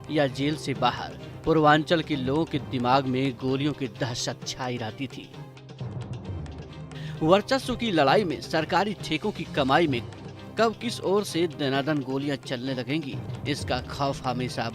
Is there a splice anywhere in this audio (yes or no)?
yes